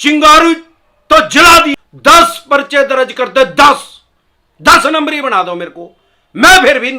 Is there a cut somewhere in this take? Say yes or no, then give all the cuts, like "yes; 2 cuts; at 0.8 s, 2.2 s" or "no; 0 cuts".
yes; 1 cut; at 1.7 s